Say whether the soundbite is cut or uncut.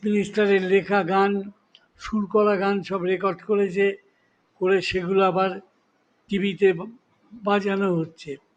uncut